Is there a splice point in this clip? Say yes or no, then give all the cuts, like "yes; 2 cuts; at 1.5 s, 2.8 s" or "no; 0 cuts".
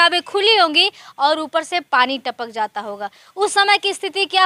no; 0 cuts